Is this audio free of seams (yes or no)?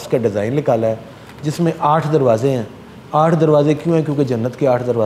yes